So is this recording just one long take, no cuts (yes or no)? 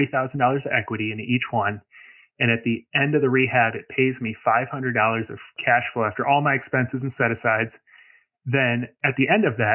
no